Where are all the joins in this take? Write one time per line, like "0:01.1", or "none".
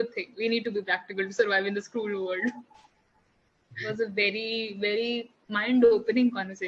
0:03.8